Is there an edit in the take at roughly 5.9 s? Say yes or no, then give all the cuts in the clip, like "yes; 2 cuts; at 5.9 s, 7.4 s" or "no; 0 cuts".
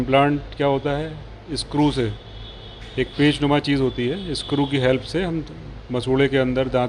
no; 1 cut; at 0.9 s